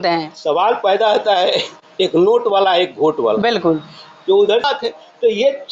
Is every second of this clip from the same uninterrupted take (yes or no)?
no